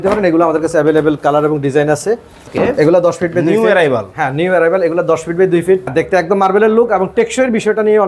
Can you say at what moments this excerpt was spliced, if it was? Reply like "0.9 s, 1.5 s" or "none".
2.4 s, 5.9 s